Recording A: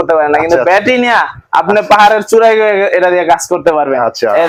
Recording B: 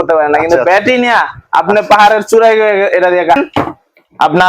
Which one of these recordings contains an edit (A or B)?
B